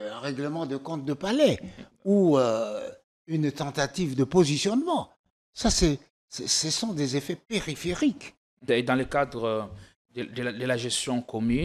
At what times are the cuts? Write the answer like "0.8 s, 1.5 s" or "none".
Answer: 8.7 s

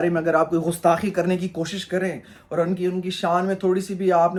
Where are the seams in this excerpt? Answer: none

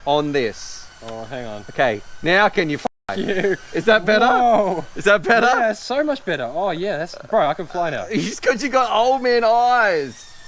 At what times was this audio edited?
none

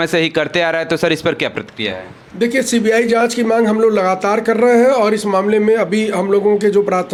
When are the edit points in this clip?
none

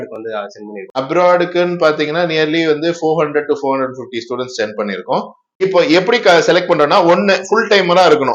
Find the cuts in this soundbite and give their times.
1.0 s, 5.6 s

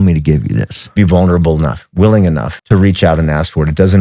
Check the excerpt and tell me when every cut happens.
0.9 s, 2.5 s

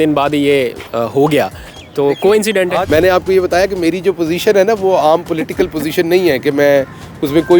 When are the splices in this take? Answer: 2.9 s

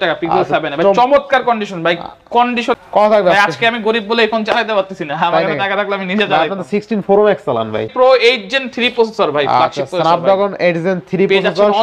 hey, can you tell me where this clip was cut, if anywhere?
2.8 s, 7.8 s

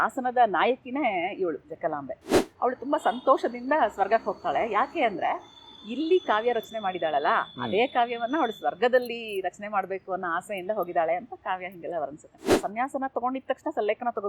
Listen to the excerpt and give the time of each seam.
2.4 s, 12.6 s

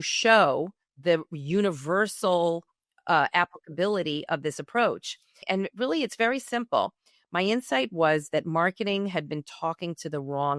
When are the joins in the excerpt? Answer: 5.4 s

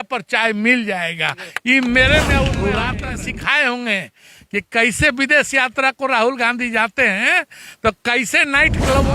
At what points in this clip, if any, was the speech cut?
2.8 s

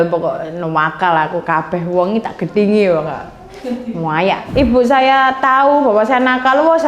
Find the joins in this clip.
4.4 s

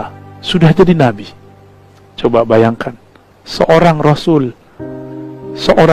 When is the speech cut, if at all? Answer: none

